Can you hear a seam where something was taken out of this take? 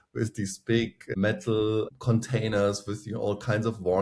yes; 2 cuts; at 1.0 s, 2.0 s

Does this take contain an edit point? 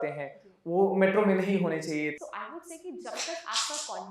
yes; 1 cut; at 2.2 s

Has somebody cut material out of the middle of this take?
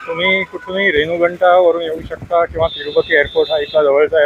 no; 0 cuts

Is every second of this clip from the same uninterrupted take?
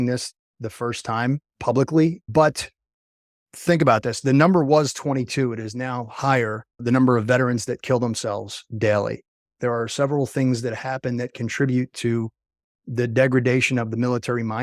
no; 3 cuts; at 2.2 s, 3.4 s, 9.4 s

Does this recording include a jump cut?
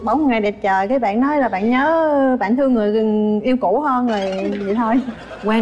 no; 0 cuts

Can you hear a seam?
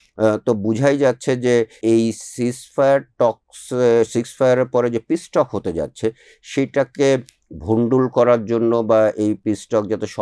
yes; 1 cut; at 1.8 s

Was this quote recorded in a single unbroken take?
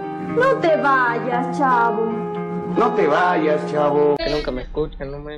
no; 1 cut; at 4.2 s

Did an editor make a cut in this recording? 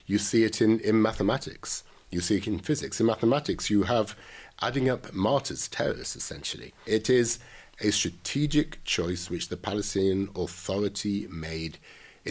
yes; 1 cut; at 6.8 s

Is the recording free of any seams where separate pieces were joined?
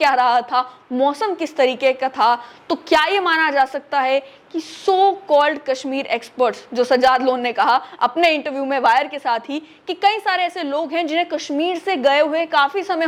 yes; 0 cuts

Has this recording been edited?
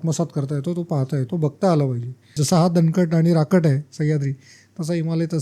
yes; 2 cuts; at 1.3 s, 2.2 s

